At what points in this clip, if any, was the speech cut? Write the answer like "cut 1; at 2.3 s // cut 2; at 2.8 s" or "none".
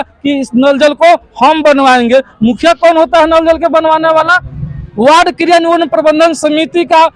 none